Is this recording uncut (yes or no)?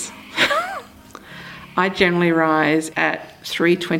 no